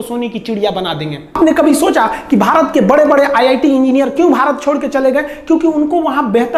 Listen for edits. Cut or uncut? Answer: uncut